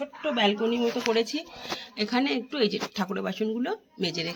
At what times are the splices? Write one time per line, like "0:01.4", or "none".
none